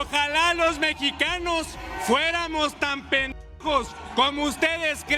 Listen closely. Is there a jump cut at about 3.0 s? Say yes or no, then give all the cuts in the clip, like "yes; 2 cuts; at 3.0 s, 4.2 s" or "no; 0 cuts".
no; 0 cuts